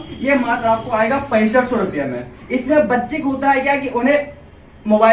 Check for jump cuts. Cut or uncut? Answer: uncut